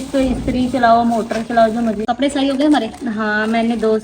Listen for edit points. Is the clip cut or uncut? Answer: cut